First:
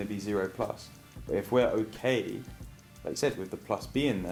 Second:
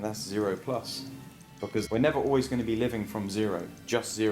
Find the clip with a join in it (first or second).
second